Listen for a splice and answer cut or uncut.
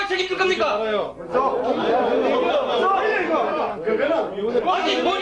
uncut